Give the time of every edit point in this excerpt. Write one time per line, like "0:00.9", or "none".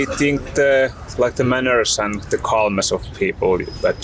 none